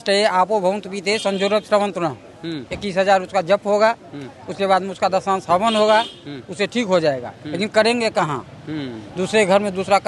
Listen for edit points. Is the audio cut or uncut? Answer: uncut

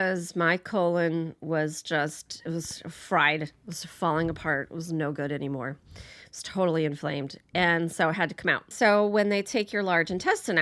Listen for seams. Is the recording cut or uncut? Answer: uncut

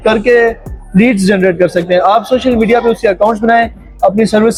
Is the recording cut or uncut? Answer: uncut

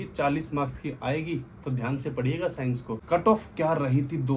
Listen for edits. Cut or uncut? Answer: cut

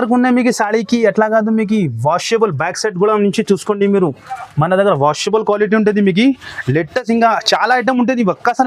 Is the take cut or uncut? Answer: uncut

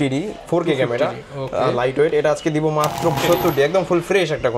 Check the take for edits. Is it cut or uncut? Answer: cut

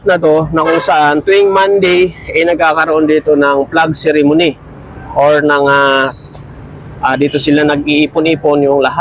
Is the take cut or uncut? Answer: uncut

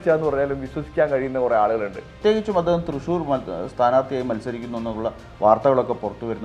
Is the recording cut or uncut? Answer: cut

